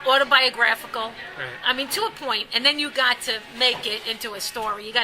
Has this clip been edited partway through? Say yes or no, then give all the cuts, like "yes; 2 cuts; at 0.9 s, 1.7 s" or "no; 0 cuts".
yes; 1 cut; at 3.8 s